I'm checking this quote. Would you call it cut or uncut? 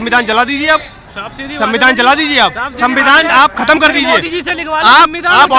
uncut